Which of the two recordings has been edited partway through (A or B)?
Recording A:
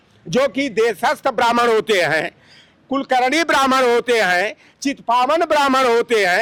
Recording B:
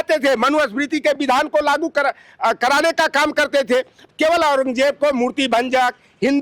B